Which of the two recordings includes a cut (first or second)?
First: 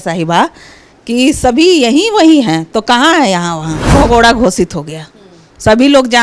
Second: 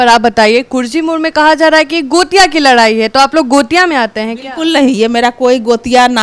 first